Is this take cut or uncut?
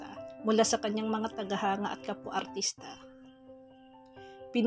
uncut